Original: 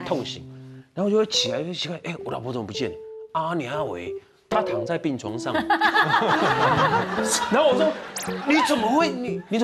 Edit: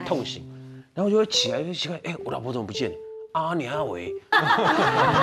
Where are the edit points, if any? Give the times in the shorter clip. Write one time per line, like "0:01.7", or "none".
0:04.3